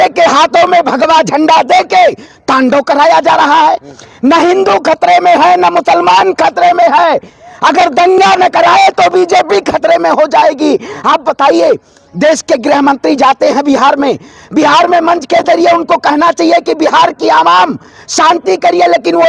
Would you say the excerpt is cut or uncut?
uncut